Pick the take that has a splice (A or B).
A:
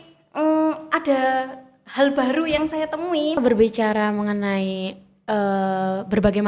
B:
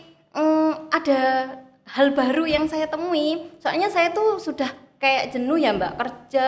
A